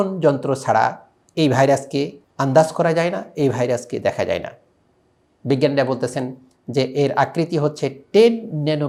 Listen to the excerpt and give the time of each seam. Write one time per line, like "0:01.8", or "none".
none